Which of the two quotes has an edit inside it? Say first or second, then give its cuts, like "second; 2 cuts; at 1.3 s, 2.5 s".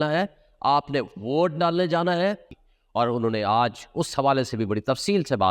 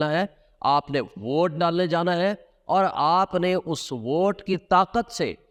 first; 1 cut; at 2.5 s